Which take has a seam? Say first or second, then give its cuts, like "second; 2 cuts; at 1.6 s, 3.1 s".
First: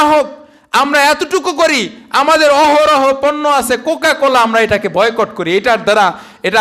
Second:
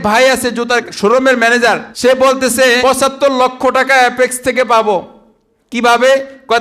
second; 3 cuts; at 0.8 s, 1.9 s, 2.8 s